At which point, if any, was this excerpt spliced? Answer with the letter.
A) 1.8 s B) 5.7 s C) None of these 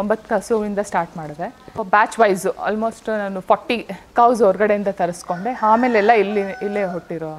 A